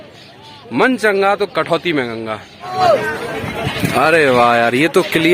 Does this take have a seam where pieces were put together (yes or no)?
yes